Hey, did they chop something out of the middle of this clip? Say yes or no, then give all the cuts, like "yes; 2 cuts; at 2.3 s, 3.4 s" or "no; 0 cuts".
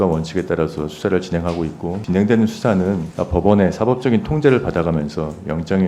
yes; 2 cuts; at 2.0 s, 3.1 s